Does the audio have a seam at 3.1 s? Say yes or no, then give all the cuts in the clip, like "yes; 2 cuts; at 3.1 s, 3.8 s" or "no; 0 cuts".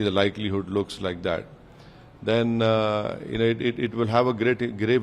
no; 0 cuts